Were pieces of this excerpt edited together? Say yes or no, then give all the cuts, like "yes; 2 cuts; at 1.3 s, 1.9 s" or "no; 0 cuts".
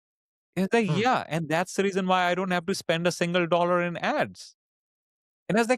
no; 0 cuts